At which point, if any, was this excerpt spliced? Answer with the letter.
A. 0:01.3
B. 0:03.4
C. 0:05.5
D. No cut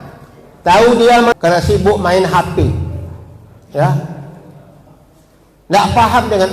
A